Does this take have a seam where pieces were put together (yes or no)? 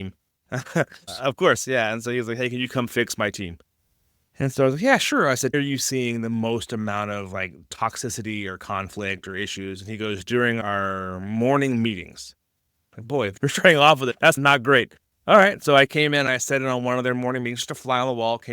yes